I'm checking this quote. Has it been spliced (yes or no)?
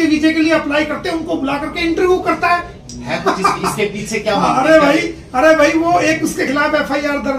yes